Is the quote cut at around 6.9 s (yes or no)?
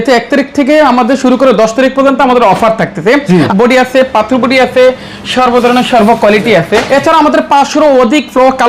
yes